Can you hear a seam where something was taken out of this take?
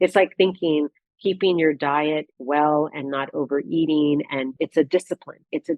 yes; 1 cut; at 4.5 s

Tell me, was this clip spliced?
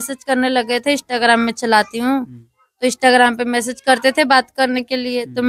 no; 0 cuts

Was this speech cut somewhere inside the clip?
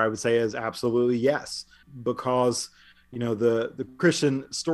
yes; 1 cut; at 1.9 s

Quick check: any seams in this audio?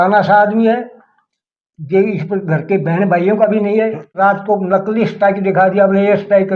yes; 1 cut; at 4.1 s

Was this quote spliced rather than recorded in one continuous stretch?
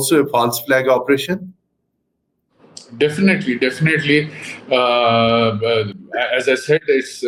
no; 0 cuts

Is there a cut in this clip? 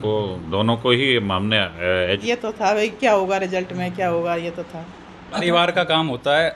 yes; 2 cuts; at 2.2 s, 5.4 s

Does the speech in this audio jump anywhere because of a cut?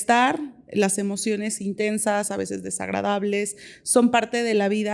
no; 0 cuts

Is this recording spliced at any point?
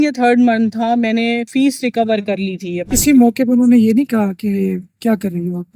yes; 1 cut; at 2.9 s

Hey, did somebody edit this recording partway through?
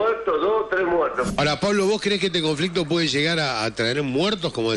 yes; 1 cut; at 1.3 s

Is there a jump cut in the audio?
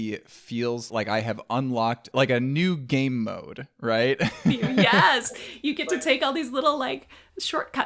yes; 2 cuts; at 0.9 s, 2.1 s

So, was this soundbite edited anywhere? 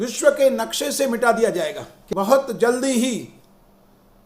yes; 1 cut; at 1.9 s

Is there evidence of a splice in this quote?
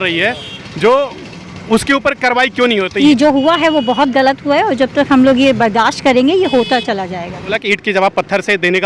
yes; 2 cuts; at 2.9 s, 7.5 s

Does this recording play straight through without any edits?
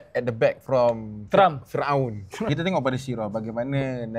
no; 1 cut; at 2.5 s

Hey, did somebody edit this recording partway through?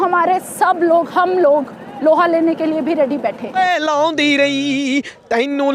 yes; 1 cut; at 3.5 s

